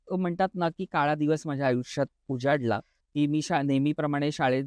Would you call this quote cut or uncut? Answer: cut